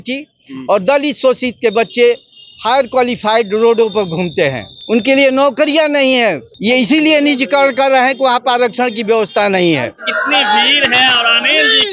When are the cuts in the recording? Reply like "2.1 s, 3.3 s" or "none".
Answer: 4.7 s, 6.5 s, 10.0 s